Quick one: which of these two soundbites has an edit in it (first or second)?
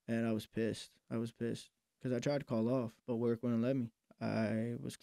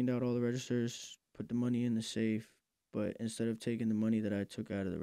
first